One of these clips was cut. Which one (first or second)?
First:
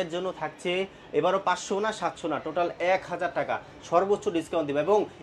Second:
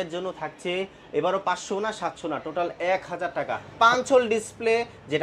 second